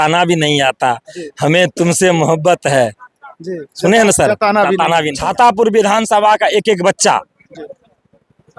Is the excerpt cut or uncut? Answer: cut